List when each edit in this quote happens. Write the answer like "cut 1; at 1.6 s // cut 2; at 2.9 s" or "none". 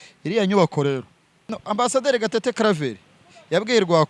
cut 1; at 1.5 s